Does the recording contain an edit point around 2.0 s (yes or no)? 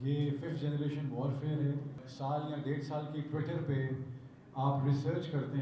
yes